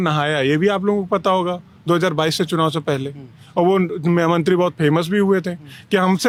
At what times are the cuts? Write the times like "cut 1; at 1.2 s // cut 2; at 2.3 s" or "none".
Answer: none